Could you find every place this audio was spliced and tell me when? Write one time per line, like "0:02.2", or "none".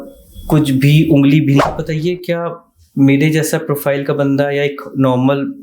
0:01.6

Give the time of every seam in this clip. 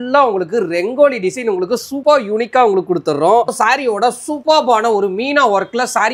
0:03.5

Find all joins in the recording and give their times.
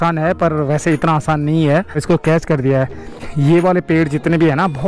0:02.0
0:03.3

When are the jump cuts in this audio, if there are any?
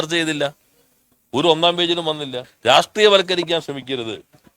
0:02.4

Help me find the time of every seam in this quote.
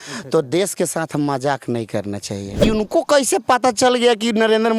0:02.6

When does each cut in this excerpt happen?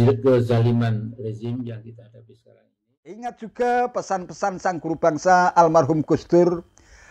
0:03.3

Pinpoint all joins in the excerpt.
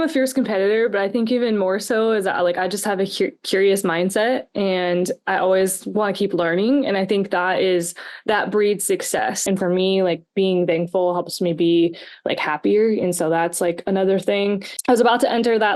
0:09.4
0:14.7

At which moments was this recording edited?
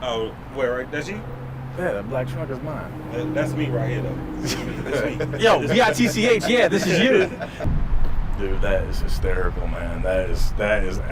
0:07.6

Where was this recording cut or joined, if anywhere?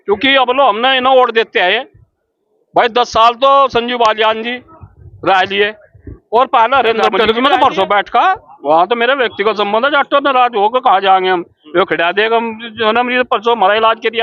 0:07.1

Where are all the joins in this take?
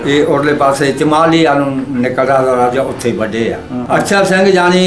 0:03.7

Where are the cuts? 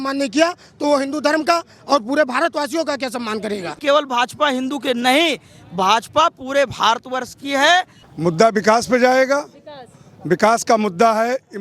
0:03.7
0:08.0

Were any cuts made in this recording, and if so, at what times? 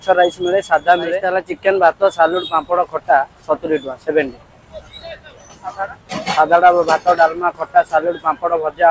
0:01.3

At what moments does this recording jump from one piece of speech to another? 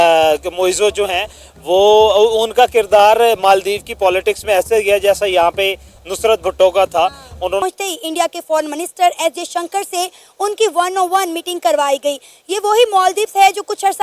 0:07.6

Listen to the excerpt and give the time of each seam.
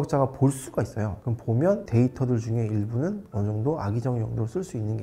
none

